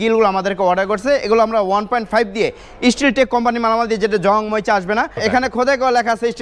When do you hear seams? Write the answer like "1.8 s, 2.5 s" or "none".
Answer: 5.2 s